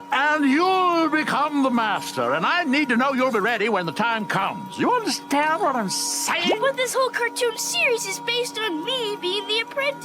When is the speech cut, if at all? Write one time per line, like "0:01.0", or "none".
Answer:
0:06.4